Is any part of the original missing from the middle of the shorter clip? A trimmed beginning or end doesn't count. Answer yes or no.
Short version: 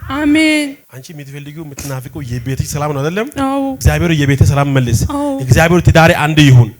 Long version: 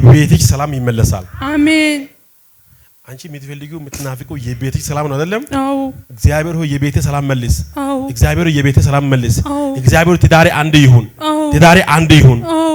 yes